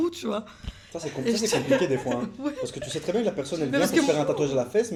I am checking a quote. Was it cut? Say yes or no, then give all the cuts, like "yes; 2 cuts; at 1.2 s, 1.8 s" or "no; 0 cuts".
no; 0 cuts